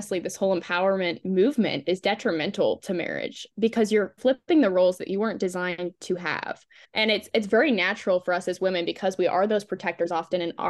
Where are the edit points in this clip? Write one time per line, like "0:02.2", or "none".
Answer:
0:01.8
0:04.2